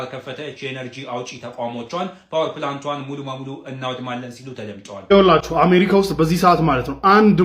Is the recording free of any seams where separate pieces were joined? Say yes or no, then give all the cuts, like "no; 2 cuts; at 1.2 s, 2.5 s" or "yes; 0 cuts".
no; 1 cut; at 5.0 s